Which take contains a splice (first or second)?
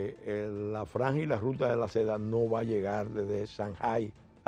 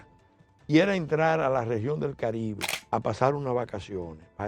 second